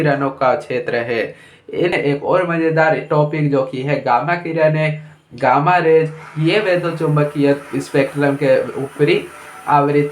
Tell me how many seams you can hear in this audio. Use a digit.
1